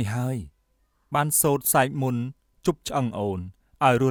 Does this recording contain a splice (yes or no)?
no